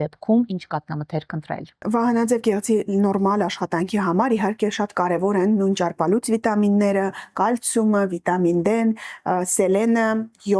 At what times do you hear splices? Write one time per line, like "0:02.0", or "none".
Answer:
0:01.8